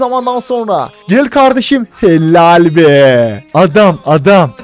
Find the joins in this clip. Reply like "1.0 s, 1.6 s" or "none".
0.9 s, 3.4 s